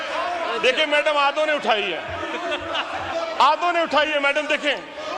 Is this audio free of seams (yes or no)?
yes